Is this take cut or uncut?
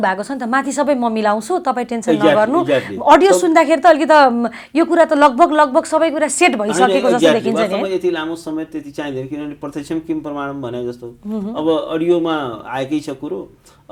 uncut